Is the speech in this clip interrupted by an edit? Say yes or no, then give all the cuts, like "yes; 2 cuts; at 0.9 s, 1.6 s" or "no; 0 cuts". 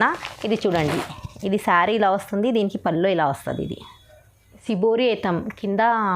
yes; 1 cut; at 4.6 s